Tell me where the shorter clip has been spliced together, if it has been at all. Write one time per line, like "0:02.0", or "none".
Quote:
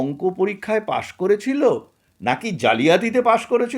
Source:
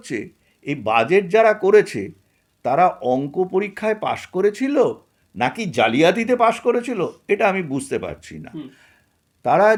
none